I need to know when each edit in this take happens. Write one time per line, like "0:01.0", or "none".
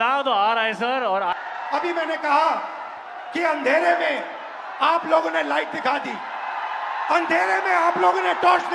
0:01.3